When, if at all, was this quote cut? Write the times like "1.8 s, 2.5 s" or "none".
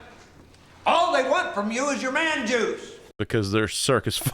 2.8 s